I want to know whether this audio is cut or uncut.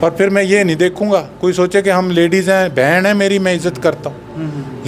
uncut